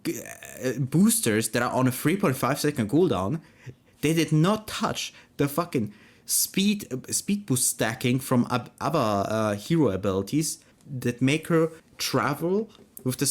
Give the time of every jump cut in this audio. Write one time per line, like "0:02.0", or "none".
0:10.6
0:11.9